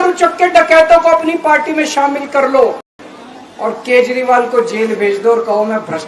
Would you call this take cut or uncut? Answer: uncut